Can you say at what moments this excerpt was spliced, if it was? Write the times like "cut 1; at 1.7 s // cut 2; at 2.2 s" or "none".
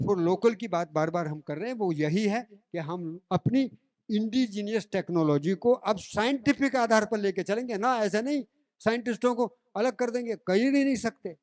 none